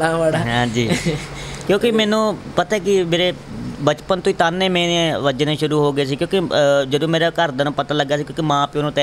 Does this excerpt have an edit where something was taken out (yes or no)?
no